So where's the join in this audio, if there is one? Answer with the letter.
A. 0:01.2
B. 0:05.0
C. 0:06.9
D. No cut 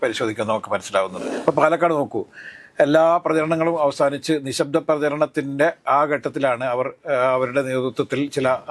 A